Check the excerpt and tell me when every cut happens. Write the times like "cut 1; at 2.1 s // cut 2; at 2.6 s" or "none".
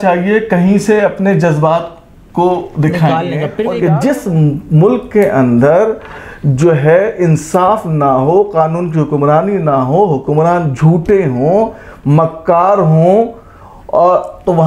cut 1; at 3.7 s